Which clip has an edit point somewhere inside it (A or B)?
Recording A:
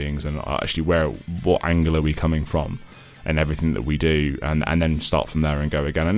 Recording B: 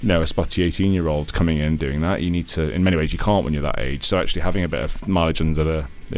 A